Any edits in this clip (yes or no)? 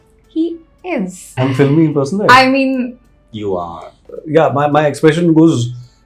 yes